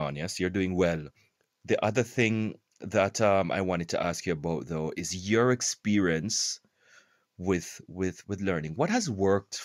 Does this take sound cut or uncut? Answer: cut